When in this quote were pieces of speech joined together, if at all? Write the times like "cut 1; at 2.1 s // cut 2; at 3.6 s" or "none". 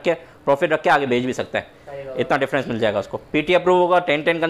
none